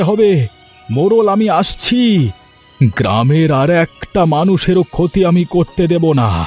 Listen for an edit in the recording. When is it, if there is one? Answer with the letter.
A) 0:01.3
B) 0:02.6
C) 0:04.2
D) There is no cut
D